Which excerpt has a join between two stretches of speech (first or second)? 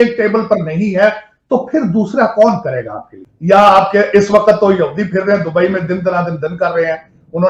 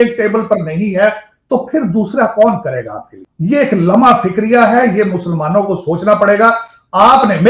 first